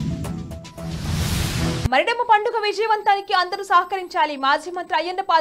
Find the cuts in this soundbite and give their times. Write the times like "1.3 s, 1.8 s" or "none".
1.8 s

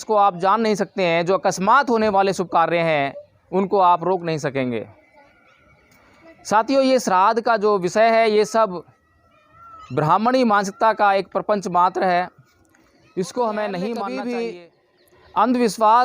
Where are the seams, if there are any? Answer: 14.1 s

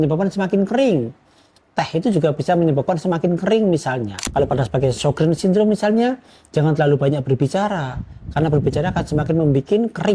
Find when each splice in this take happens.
4.2 s

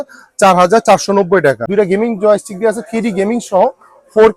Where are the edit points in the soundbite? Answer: 1.6 s

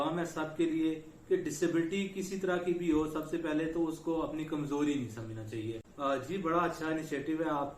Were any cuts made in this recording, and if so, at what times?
5.9 s

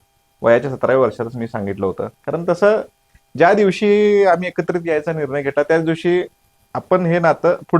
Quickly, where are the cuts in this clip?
none

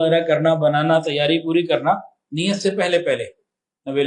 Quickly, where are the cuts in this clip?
none

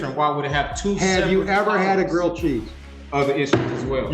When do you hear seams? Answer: 3.0 s

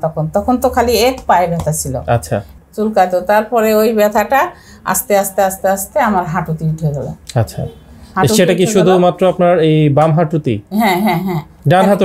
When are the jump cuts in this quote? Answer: 2.5 s

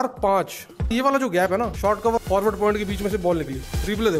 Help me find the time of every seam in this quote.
2.1 s

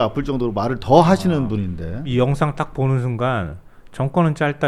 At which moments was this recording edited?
2.1 s

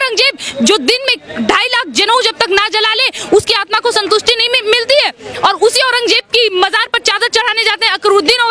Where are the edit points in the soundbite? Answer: none

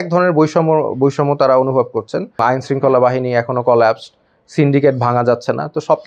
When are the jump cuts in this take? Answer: 2.4 s

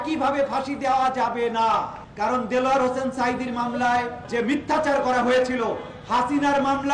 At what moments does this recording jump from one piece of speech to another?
2.0 s, 4.2 s

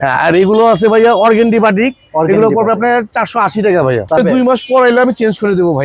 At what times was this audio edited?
4.2 s

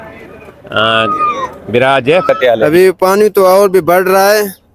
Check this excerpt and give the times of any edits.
2.3 s

